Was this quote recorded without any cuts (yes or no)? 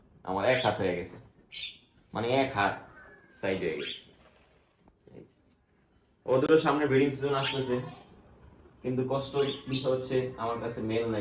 yes